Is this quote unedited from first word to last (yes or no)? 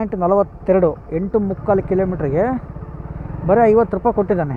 yes